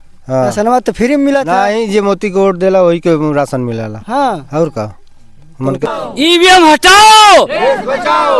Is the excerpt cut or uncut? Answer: cut